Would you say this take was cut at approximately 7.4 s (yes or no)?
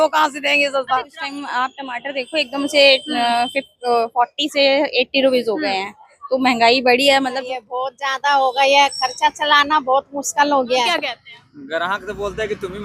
yes